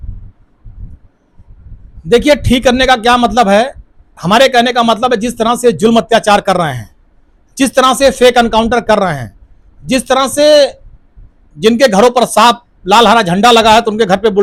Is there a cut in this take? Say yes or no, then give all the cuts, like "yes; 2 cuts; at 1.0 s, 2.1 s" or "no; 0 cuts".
no; 0 cuts